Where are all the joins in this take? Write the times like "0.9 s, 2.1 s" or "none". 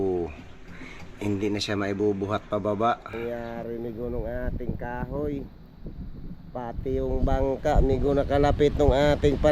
3.1 s